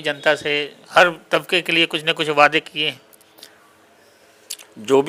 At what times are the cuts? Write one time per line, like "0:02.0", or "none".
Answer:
none